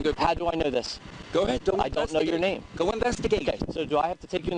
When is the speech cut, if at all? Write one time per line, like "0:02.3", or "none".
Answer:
0:03.6